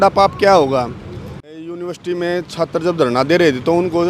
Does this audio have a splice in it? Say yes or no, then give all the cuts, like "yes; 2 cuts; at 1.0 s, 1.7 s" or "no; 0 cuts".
yes; 1 cut; at 1.4 s